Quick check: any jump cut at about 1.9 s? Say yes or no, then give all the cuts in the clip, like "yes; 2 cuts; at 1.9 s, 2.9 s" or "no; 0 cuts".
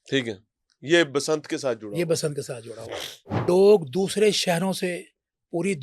no; 1 cut; at 3.4 s